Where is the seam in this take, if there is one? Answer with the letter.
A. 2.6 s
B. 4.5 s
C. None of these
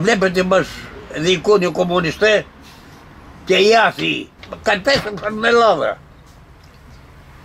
B